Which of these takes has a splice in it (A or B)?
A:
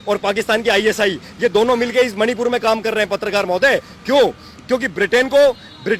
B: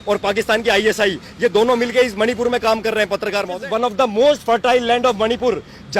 B